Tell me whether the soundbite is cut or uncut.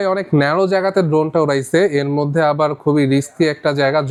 uncut